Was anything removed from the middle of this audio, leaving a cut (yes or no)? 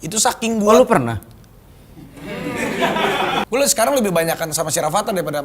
yes